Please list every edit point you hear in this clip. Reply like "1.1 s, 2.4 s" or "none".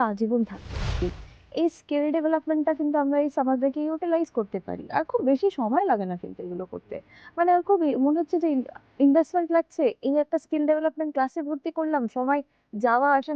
0.9 s

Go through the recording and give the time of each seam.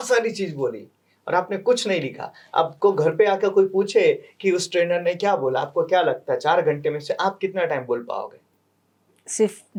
none

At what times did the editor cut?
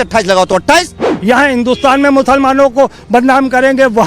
1.1 s

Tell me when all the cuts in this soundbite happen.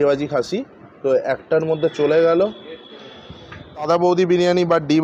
3.9 s

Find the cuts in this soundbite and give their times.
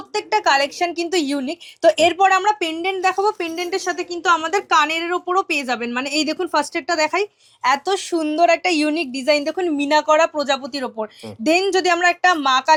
none

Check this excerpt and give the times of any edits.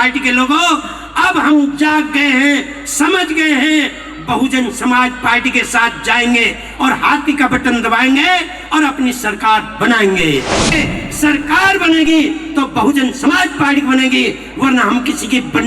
10.7 s

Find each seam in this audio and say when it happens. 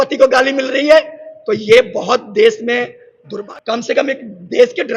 3.3 s

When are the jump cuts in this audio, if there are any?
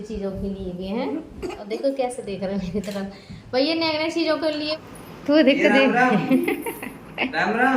4.7 s

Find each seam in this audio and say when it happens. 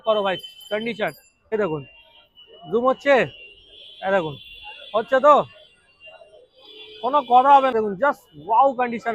1.5 s, 7.7 s

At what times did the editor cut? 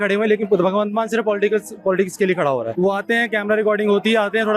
2.7 s

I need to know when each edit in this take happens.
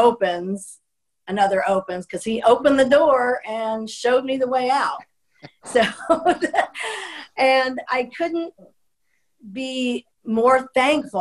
10.1 s

